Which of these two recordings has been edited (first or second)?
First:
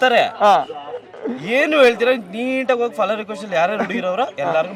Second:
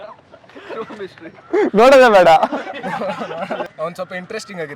second